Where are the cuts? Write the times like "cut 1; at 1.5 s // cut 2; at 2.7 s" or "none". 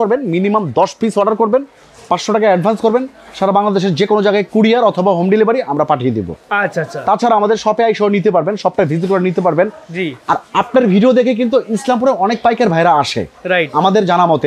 none